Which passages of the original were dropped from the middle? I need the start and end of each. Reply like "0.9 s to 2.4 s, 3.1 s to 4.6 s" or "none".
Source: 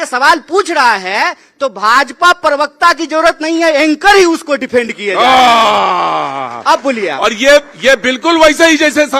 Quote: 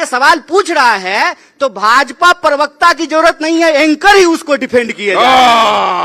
none